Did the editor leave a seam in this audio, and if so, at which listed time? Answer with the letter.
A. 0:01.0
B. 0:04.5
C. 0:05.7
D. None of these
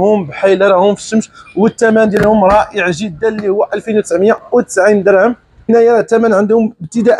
C